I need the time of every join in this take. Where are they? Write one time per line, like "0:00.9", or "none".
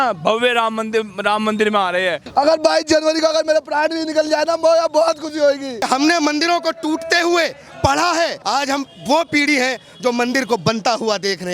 0:02.2
0:05.8
0:08.4